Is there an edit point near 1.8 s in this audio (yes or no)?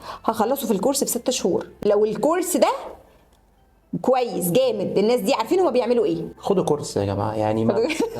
no